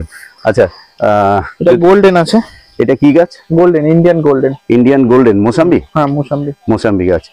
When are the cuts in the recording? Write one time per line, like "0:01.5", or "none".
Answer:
none